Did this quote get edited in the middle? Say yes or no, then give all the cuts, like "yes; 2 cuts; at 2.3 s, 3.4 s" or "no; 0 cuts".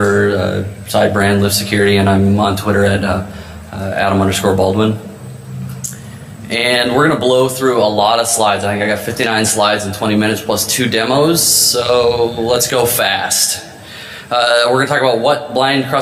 yes; 1 cut; at 10.7 s